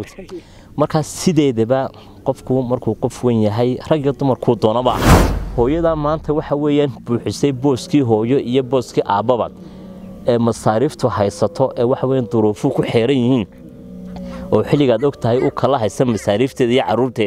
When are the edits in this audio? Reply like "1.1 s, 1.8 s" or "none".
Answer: 5.4 s